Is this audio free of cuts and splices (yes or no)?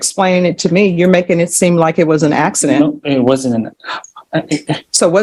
yes